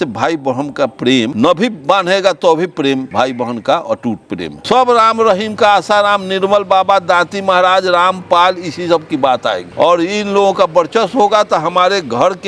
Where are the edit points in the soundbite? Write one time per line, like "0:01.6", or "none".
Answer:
0:01.3
0:03.1
0:04.5